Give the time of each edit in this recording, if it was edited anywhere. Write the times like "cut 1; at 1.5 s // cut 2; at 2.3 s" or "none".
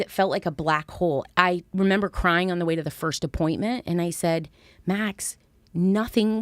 cut 1; at 1.2 s